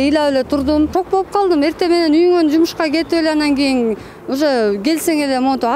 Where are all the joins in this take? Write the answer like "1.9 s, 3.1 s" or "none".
0.9 s